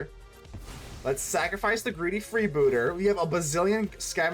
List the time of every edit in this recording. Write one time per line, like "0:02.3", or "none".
none